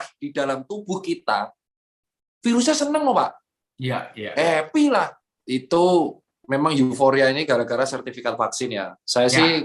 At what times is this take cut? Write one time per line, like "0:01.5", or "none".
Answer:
0:05.3